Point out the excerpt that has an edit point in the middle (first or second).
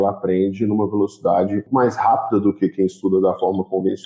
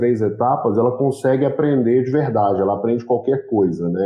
first